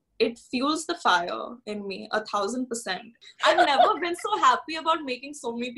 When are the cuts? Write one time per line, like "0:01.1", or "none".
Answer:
0:03.2